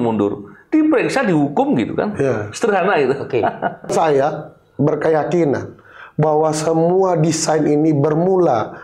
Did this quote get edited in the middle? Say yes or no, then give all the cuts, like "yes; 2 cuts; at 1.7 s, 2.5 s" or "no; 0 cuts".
yes; 1 cut; at 3.9 s